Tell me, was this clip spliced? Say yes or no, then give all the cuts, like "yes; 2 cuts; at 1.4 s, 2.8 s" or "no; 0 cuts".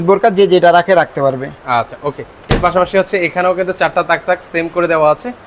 no; 0 cuts